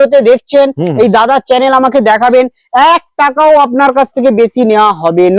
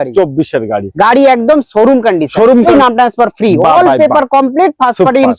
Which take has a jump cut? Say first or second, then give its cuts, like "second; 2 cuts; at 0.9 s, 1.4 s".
second; 1 cut; at 2.7 s